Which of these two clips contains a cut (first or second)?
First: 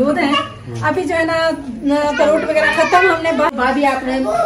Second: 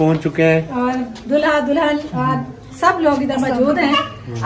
first